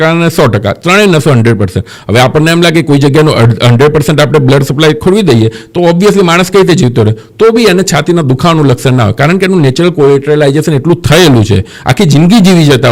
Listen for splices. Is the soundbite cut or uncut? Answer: uncut